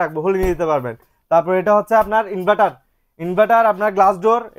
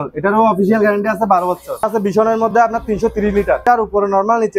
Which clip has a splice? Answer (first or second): second